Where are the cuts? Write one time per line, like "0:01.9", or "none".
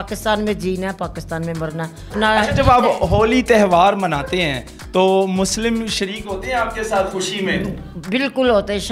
0:02.1